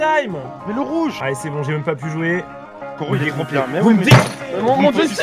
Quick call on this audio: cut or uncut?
cut